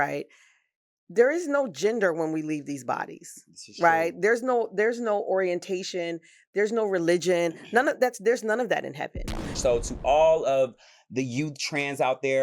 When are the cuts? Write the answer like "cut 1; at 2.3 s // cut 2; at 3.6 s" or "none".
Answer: cut 1; at 9.5 s